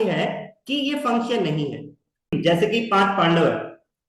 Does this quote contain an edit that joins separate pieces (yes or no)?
yes